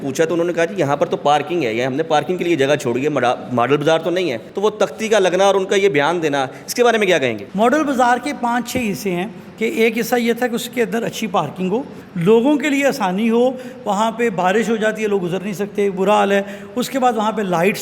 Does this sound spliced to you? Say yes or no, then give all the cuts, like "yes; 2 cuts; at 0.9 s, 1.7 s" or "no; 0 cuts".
yes; 3 cuts; at 4.4 s, 7.4 s, 12.0 s